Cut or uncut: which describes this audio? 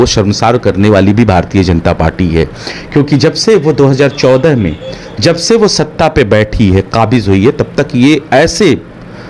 uncut